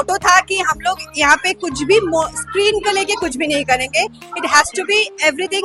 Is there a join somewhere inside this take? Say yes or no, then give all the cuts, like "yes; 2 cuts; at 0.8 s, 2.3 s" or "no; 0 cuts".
no; 0 cuts